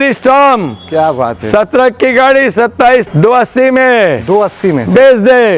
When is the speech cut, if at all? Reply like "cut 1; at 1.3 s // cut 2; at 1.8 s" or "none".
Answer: cut 1; at 3.1 s